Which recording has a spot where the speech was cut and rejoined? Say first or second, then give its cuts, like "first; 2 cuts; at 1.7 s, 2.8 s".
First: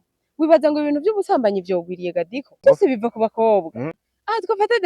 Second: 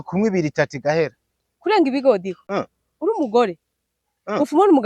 first; 1 cut; at 2.6 s